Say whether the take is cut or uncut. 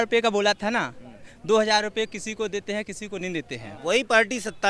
cut